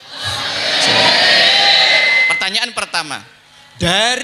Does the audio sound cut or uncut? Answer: cut